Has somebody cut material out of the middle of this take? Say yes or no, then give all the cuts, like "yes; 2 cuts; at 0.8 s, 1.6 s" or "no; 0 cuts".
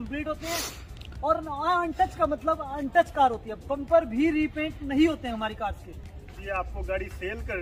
yes; 1 cut; at 6.3 s